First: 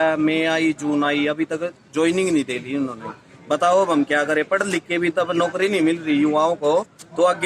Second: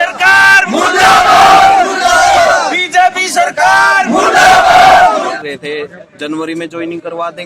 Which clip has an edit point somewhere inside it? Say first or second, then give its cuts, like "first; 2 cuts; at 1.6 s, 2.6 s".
second; 1 cut; at 5.3 s